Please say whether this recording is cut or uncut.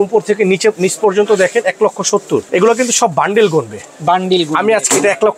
cut